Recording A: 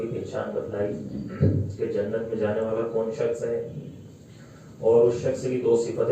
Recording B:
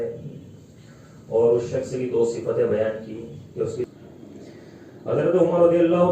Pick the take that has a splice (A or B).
B